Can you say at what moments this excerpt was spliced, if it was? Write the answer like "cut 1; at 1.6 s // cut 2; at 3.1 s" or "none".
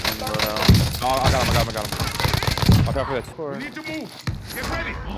cut 1; at 3.3 s